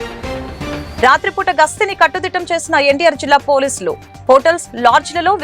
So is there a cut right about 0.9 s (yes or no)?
yes